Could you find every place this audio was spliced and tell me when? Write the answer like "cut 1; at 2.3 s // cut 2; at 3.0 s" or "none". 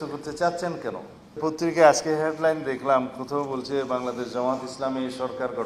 cut 1; at 1.4 s